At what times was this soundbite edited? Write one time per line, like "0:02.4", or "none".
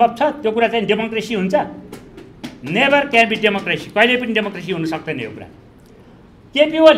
none